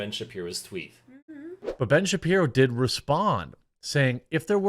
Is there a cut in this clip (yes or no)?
yes